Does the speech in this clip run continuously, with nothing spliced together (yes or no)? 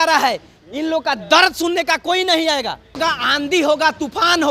no